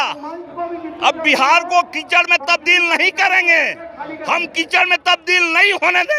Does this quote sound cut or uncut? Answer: uncut